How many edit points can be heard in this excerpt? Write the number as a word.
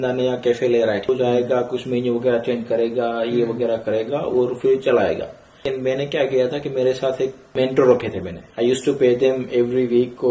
three